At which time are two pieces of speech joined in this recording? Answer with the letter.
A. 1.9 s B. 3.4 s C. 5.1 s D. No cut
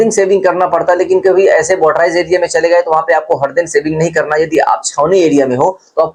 D